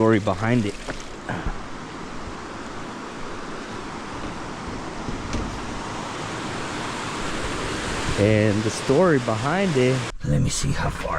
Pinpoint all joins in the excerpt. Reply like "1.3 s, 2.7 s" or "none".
10.1 s

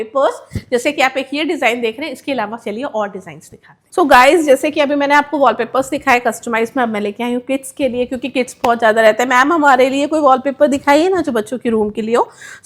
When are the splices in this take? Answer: none

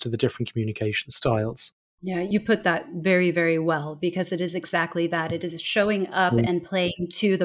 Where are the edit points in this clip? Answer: 2.2 s

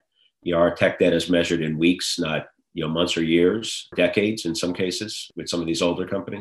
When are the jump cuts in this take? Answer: 3.9 s, 5.3 s

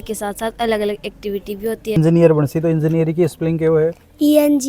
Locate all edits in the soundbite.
2.0 s

